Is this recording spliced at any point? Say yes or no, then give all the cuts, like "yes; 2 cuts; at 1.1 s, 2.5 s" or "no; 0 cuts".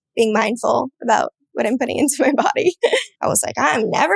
yes; 1 cut; at 3.1 s